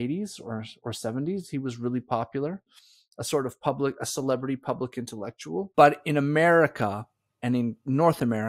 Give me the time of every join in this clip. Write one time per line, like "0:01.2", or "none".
0:05.7